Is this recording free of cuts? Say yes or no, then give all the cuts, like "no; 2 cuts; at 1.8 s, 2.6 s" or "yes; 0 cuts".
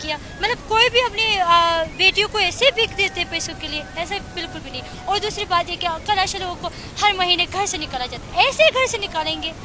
yes; 0 cuts